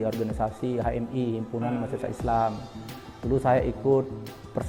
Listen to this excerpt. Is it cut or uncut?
uncut